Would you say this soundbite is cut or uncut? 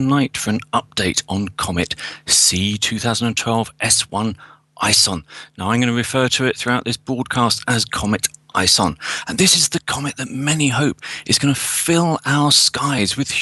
uncut